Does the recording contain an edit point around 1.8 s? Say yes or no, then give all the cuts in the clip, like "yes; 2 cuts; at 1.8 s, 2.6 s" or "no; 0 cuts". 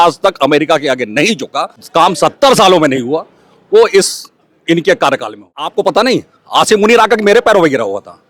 yes; 2 cuts; at 1.8 s, 5.7 s